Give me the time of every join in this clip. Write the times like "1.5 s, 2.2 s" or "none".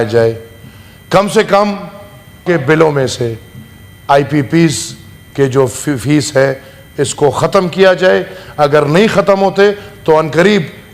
2.4 s